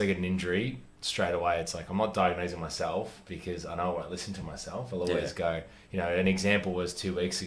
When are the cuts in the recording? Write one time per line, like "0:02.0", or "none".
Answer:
none